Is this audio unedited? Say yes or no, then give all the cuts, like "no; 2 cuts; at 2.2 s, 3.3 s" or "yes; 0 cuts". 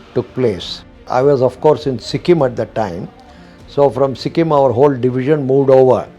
no; 1 cut; at 1.0 s